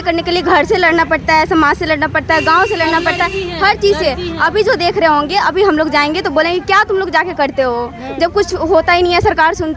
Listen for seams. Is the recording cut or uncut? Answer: uncut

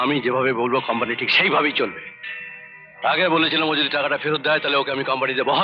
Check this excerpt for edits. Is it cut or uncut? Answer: uncut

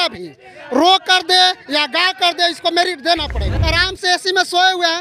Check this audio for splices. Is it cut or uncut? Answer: cut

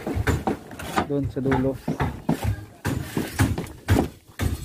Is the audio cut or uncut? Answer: uncut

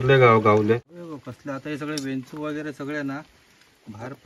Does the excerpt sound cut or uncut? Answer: cut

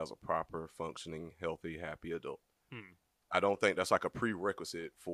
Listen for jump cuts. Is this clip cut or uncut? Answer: uncut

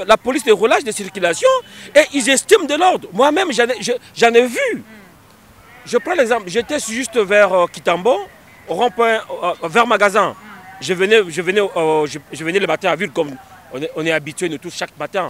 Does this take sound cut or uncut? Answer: uncut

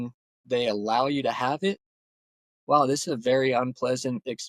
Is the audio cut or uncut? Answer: cut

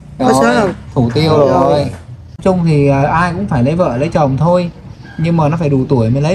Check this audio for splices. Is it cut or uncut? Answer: cut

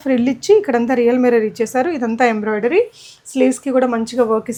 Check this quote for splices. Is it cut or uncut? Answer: uncut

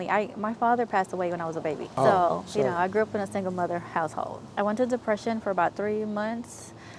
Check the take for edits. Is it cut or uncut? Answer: cut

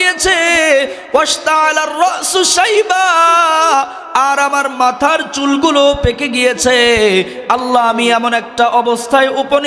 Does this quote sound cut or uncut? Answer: uncut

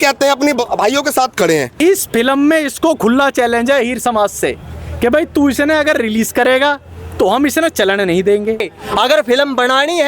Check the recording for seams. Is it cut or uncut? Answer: cut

